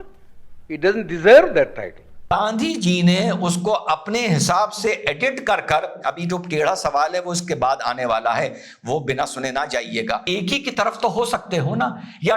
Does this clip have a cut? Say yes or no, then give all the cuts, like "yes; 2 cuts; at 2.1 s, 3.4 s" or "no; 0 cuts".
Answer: yes; 2 cuts; at 2.3 s, 10.2 s